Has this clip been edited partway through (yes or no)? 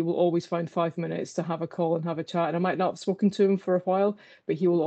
no